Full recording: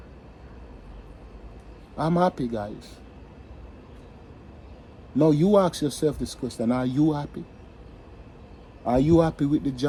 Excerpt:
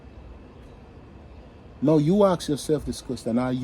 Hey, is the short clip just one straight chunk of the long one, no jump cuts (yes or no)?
yes